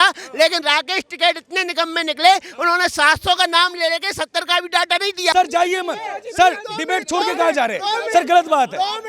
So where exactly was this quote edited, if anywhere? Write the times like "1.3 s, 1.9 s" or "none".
5.3 s